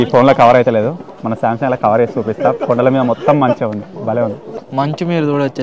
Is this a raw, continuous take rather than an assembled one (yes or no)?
yes